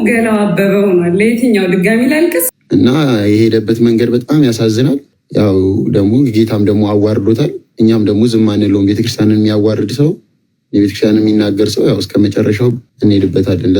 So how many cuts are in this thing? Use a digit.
3